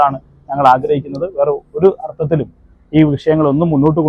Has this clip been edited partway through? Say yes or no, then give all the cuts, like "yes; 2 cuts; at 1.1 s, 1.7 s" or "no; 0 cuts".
no; 0 cuts